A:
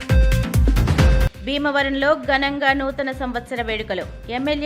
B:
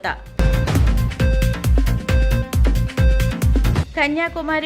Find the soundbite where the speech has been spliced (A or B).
A